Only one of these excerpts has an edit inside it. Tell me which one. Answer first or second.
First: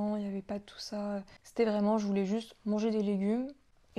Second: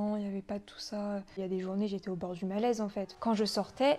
second